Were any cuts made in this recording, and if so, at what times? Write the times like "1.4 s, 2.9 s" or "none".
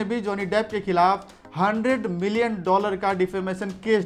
none